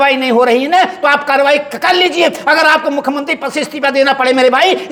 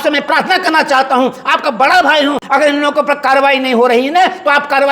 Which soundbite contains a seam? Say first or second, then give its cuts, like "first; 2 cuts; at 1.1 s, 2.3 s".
second; 1 cut; at 2.4 s